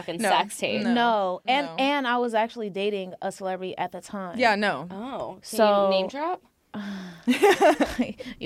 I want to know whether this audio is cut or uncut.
uncut